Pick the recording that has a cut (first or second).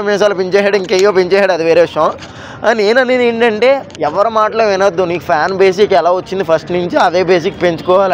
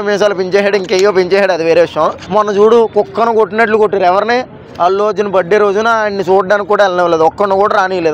second